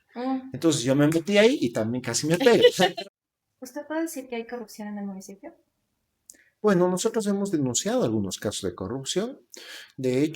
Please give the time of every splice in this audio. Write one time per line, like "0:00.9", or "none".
0:02.8